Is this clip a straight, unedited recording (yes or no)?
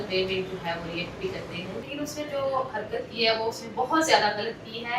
no